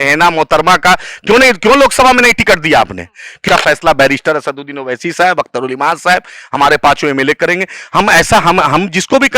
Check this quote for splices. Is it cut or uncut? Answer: cut